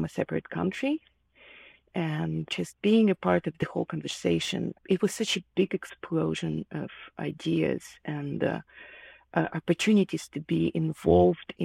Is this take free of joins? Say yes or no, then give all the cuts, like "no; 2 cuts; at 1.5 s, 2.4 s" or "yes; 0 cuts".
no; 2 cuts; at 2.5 s, 4.8 s